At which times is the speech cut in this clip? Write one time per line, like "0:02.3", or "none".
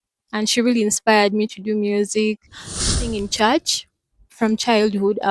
0:02.9

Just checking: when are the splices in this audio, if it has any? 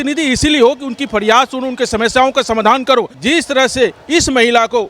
0:03.1

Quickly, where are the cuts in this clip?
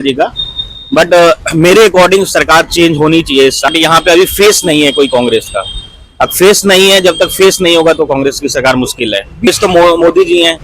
0:03.7
0:09.5

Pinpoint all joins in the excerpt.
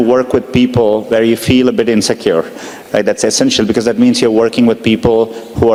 none

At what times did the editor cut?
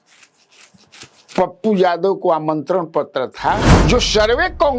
0:03.7

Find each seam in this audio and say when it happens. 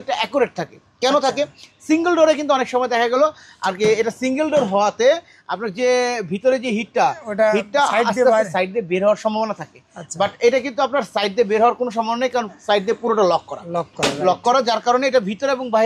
none

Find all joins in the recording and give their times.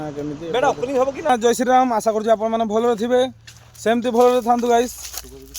0:01.3

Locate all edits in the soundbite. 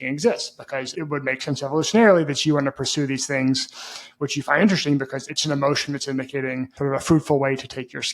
0:06.7

